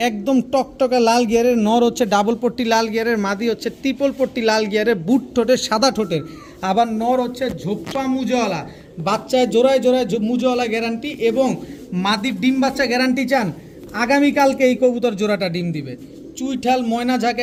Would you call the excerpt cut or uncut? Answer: uncut